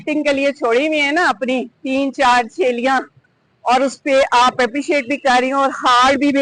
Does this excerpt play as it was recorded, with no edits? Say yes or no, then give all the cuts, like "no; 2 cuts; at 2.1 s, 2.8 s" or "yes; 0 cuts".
yes; 0 cuts